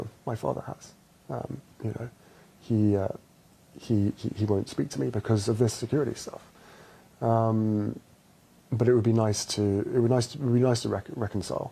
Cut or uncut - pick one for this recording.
uncut